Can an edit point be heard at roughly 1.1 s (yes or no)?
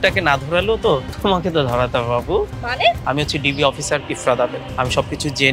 yes